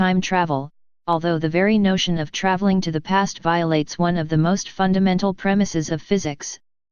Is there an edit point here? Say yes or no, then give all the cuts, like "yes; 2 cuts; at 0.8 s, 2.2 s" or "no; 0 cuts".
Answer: no; 0 cuts